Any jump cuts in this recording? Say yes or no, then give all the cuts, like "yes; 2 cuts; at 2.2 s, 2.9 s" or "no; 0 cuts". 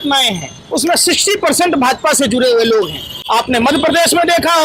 no; 0 cuts